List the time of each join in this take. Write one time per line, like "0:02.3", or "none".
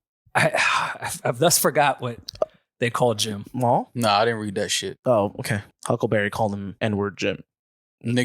0:03.9
0:05.6
0:06.7